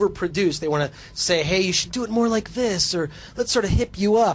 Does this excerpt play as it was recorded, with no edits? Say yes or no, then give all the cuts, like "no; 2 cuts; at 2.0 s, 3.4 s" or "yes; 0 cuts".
yes; 0 cuts